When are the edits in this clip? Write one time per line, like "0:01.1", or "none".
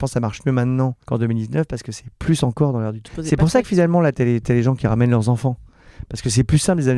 0:01.0
0:03.0